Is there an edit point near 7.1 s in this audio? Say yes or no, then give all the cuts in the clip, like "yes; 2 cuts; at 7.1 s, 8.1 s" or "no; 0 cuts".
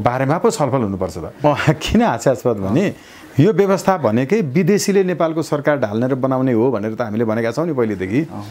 no; 2 cuts; at 1.4 s, 3.2 s